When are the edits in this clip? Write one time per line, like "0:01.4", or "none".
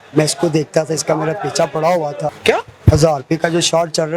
0:02.4